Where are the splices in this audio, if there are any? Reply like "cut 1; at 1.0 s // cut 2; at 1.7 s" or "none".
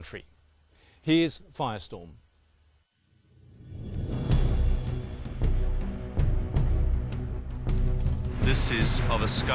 none